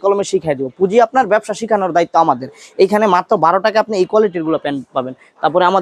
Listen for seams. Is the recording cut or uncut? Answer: uncut